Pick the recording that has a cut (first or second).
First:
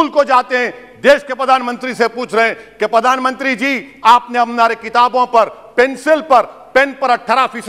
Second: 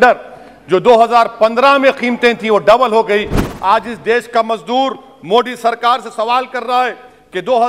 second